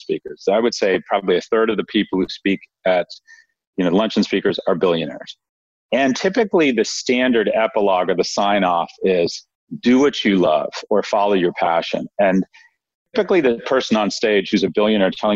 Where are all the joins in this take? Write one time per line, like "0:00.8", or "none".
0:13.1